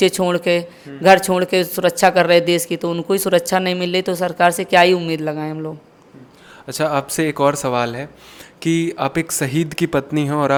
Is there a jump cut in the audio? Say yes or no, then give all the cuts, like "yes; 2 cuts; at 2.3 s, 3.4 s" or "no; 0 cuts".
no; 0 cuts